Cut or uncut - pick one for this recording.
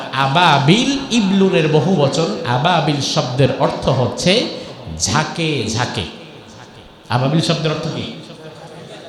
uncut